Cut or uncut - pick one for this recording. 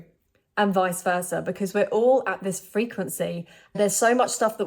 cut